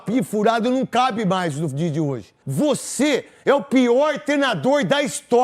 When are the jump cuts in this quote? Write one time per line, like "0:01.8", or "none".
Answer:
0:02.4